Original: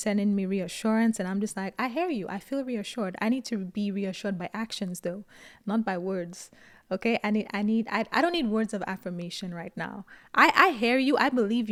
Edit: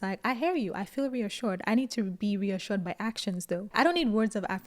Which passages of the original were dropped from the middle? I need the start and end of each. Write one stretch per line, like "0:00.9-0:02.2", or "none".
0:05.3-0:08.1